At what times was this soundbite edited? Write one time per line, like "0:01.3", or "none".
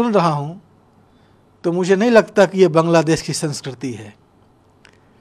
none